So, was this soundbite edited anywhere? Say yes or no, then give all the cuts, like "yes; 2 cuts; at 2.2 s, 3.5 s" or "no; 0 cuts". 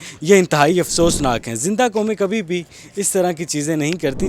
no; 0 cuts